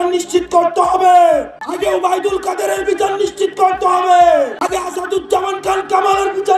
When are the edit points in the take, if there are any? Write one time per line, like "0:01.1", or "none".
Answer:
0:01.6
0:04.6